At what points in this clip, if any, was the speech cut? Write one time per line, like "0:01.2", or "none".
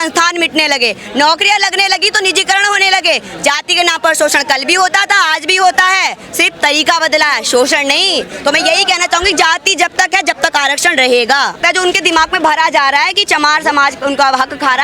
0:11.6